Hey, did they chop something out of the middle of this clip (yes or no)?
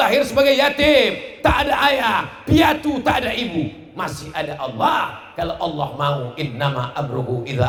no